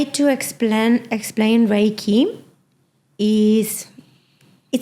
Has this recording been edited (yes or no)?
no